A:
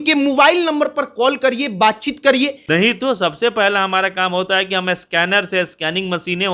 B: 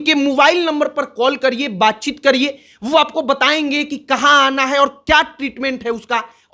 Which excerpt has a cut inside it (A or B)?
A